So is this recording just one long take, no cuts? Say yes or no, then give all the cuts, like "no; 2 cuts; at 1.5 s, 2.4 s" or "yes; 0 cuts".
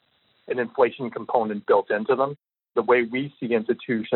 no; 1 cut; at 2.3 s